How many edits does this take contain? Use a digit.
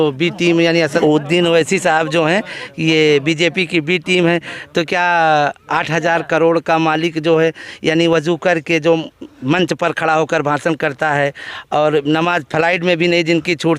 1